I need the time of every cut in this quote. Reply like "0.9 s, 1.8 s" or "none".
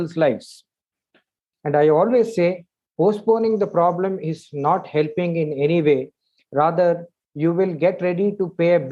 1.1 s